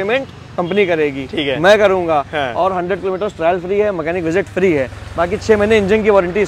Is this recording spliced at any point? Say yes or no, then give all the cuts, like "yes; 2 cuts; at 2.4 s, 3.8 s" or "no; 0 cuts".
no; 0 cuts